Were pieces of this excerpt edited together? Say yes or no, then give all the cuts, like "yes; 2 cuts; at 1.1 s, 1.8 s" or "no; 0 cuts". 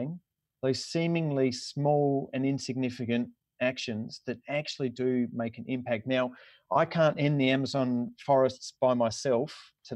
no; 0 cuts